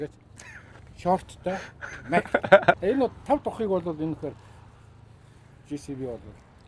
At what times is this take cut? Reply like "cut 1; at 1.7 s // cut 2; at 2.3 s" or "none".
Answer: cut 1; at 2.8 s